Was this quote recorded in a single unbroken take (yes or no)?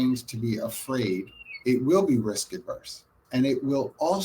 no